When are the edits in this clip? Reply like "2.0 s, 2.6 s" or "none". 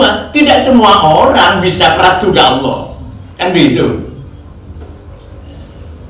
none